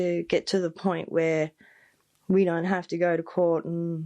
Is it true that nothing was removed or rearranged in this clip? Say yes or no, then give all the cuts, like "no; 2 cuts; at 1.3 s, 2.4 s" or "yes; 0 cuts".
yes; 0 cuts